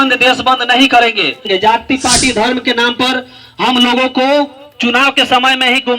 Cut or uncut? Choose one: cut